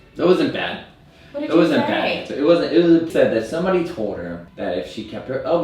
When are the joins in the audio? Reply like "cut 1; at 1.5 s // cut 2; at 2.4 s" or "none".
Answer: cut 1; at 3.1 s // cut 2; at 4.4 s